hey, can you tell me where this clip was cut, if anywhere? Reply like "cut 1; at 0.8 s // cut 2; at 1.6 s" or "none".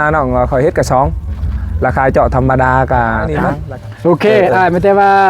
cut 1; at 3.5 s